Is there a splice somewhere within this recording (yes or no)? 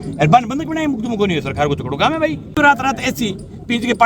yes